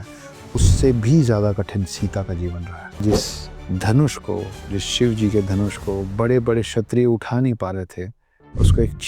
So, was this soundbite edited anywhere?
yes; 1 cut; at 3.0 s

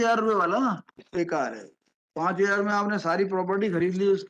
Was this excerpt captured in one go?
no; 2 cuts; at 1.0 s, 2.3 s

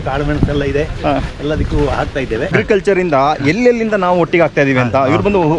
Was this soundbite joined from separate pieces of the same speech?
yes; 1 cut; at 2.5 s

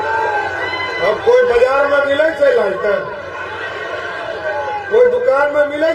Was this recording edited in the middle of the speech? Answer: no; 0 cuts

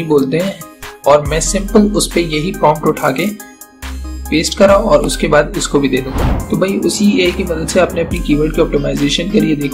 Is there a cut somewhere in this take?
yes; 1 cut; at 6.1 s

